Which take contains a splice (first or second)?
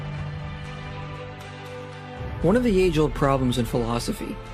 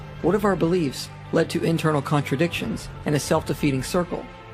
second